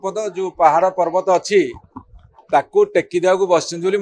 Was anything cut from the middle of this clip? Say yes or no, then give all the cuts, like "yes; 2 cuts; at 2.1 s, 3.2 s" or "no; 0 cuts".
no; 0 cuts